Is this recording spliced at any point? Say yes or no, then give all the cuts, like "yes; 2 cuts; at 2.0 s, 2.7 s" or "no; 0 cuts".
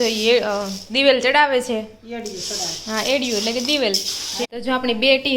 yes; 1 cut; at 4.4 s